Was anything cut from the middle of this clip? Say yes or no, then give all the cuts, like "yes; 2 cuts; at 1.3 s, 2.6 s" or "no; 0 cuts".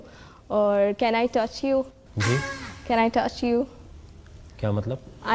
no; 0 cuts